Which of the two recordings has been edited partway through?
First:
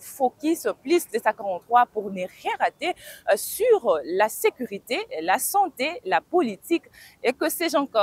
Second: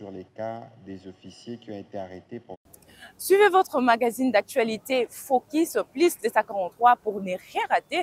second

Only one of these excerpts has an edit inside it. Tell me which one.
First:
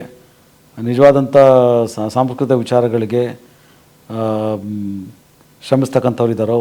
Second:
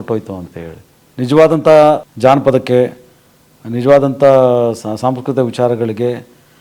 second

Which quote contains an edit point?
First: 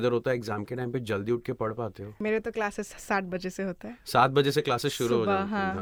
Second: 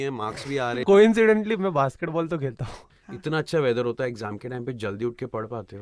second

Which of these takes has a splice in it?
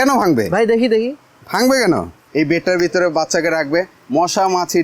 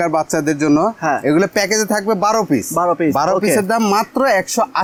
first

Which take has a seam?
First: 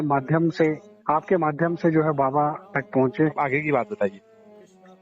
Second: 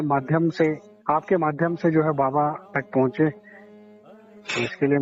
first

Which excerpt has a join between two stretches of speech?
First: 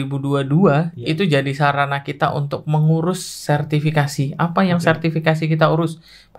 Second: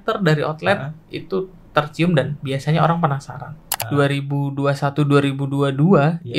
second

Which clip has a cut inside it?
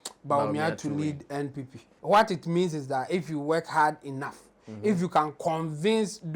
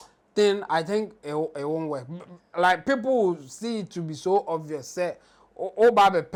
first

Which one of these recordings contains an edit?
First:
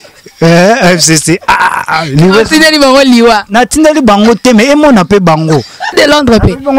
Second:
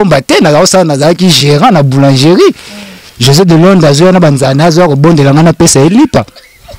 first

